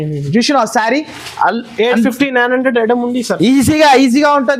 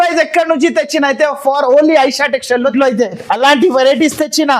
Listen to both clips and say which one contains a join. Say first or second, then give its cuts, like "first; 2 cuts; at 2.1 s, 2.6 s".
second; 1 cut; at 2.7 s